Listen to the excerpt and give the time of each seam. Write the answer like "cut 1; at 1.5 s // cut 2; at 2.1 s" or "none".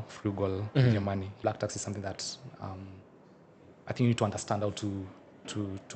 cut 1; at 1.3 s